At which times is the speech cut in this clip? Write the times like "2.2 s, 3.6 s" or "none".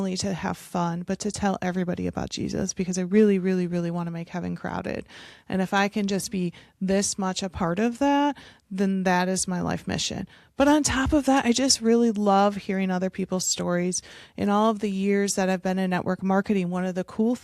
none

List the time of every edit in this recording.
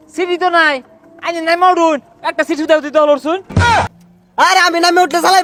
none

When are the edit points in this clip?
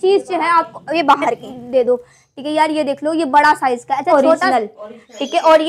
1.5 s, 4.1 s

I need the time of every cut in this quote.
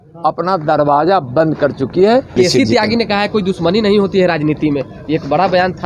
2.4 s

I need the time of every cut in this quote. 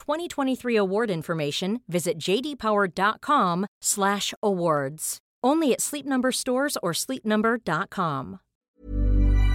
8.6 s

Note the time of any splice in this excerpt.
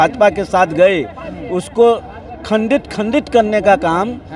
none

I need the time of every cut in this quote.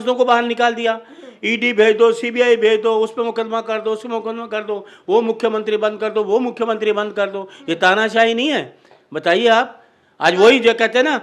none

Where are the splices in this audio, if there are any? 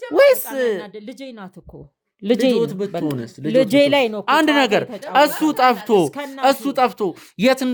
none

